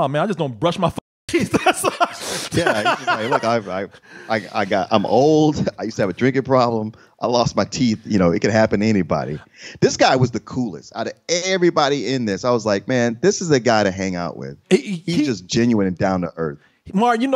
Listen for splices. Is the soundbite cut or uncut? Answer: uncut